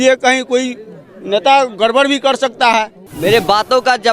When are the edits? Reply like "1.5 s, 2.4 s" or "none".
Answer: 3.0 s